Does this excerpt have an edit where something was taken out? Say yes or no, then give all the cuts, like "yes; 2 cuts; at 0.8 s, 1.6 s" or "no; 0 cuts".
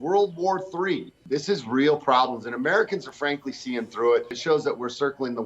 yes; 2 cuts; at 1.1 s, 4.4 s